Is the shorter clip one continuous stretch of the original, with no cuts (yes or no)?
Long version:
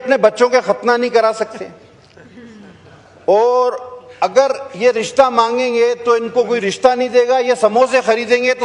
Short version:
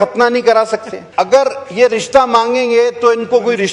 no